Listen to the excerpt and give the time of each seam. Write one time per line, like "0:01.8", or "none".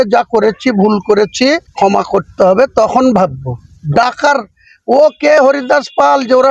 0:01.7